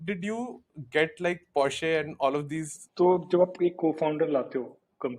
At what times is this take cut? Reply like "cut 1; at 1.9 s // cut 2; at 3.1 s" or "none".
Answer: cut 1; at 2.8 s